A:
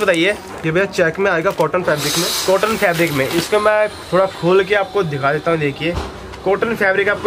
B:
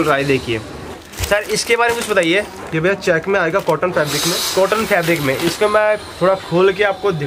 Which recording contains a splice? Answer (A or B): B